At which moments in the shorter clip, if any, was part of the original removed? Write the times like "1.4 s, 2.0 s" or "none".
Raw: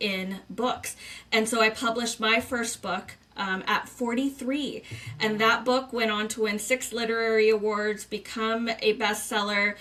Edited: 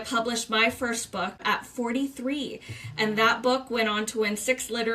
1.4 s